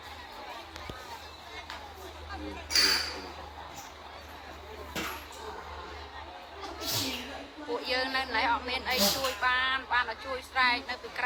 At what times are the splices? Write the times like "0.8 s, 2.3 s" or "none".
none